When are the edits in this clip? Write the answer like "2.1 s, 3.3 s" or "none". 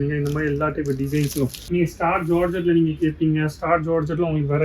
1.6 s